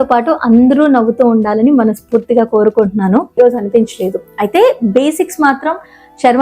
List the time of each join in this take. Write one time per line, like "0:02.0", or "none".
0:03.4